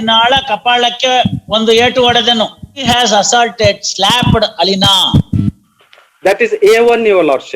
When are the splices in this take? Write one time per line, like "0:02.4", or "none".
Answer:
0:02.8